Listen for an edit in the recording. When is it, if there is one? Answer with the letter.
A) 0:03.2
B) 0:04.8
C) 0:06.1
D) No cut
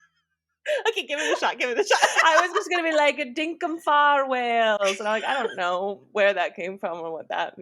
D